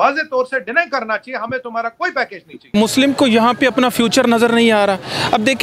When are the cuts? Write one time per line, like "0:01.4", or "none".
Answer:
0:02.7